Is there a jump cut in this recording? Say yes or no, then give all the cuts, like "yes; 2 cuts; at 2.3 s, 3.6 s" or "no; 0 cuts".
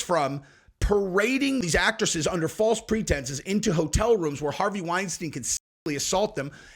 yes; 1 cut; at 1.6 s